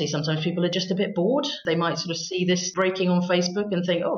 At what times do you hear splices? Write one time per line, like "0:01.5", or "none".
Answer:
0:01.6
0:02.7